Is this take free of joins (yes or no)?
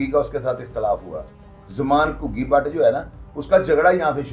yes